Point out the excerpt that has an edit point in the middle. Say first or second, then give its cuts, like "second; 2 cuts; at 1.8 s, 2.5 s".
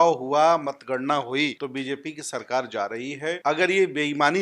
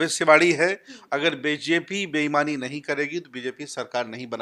first; 2 cuts; at 1.6 s, 3.4 s